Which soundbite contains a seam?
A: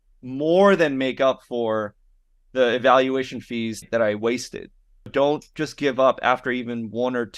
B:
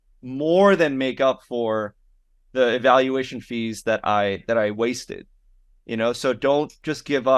A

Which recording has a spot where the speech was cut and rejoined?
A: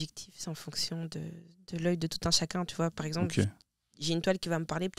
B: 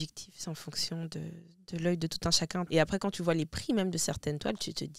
B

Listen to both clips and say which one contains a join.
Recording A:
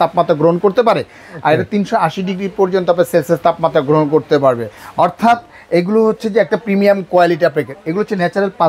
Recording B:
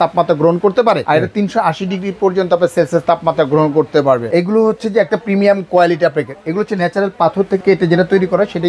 B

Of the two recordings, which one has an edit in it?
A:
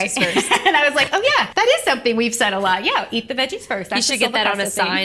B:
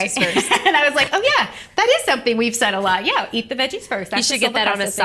A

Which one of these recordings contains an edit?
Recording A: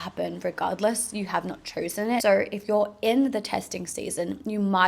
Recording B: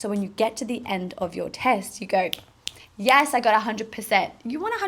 A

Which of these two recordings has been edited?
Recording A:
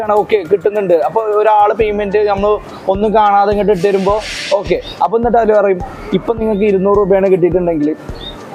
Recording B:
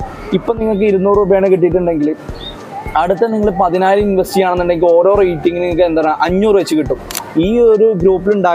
B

